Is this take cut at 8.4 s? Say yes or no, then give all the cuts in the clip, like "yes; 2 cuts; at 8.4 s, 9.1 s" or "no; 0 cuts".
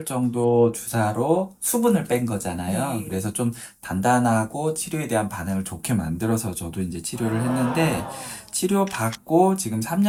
no; 0 cuts